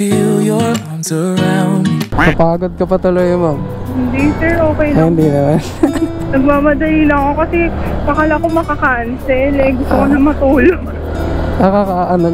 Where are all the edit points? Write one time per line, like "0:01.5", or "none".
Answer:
0:02.1